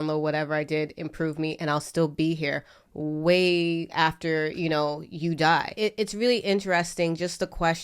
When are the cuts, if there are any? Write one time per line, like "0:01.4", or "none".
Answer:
0:05.7